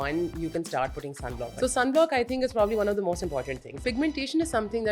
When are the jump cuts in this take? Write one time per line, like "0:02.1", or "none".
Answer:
0:01.4
0:03.8